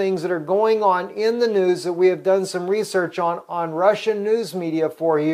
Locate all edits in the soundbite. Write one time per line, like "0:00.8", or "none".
0:02.7